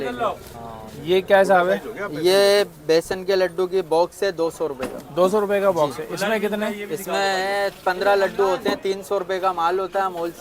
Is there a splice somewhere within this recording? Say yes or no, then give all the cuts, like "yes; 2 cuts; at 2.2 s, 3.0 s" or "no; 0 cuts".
no; 0 cuts